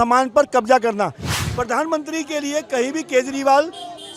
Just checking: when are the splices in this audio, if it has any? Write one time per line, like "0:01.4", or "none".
0:01.3